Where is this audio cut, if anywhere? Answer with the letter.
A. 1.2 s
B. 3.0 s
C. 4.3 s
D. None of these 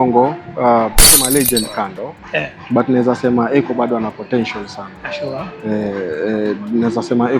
A